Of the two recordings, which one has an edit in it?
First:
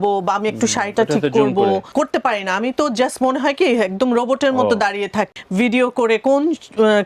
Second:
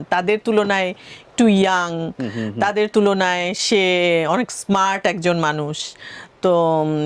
first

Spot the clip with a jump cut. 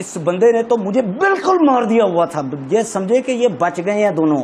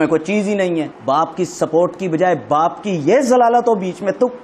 second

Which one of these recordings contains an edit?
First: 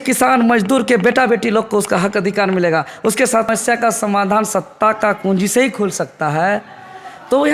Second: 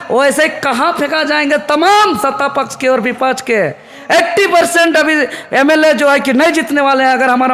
first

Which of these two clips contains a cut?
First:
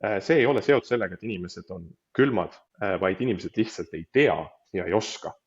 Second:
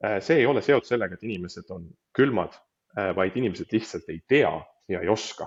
first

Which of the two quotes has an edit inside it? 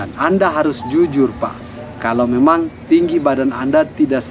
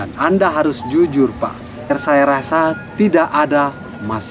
second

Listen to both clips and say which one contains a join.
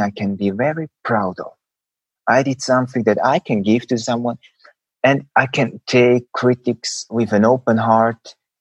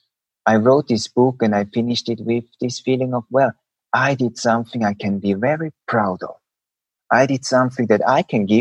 first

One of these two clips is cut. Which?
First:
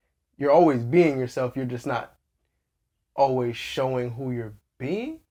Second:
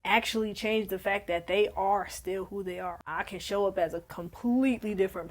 second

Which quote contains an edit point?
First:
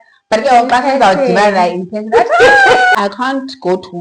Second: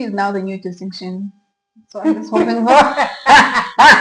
first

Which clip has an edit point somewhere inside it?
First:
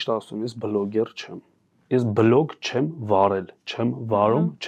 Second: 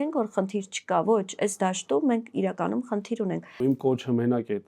second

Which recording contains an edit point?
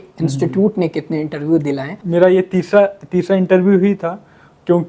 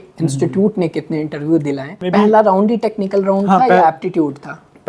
second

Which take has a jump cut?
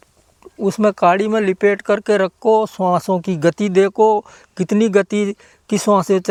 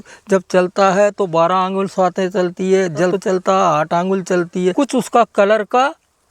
second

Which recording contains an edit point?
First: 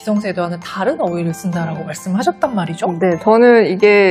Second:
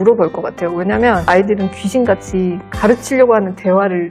first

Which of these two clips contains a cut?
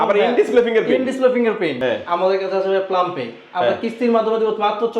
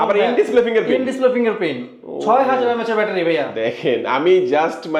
first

